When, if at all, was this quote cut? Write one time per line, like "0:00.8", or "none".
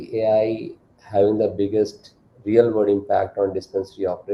none